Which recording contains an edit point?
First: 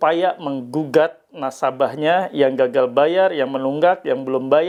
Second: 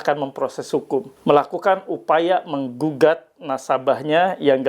second; 1 cut; at 1.1 s

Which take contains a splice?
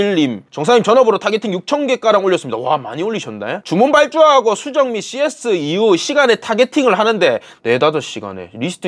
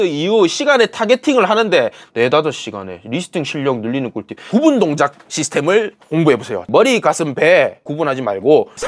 second; 2 cuts; at 4.3 s, 6.6 s

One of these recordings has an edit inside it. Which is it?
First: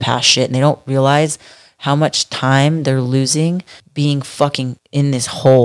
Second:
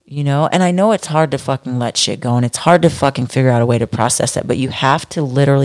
first; 2 cuts; at 3.8 s, 4.8 s

